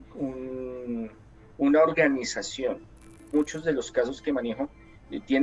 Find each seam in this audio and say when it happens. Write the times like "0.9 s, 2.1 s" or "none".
3.2 s